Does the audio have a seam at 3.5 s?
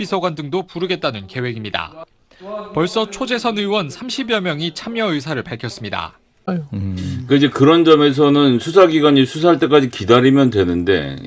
no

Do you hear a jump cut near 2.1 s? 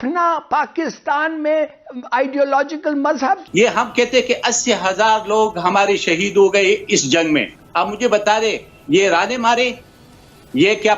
no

